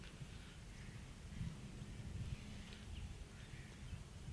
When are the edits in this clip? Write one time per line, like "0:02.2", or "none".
none